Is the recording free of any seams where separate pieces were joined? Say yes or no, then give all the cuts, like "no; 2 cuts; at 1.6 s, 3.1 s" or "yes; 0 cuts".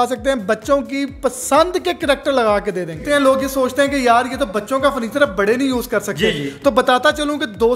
no; 1 cut; at 3.0 s